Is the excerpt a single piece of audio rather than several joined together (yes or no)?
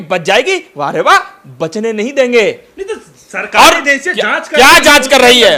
yes